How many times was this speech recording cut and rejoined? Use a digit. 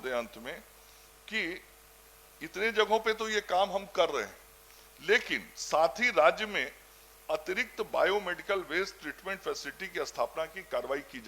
0